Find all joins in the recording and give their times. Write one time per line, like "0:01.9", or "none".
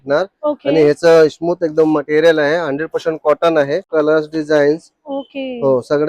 0:03.9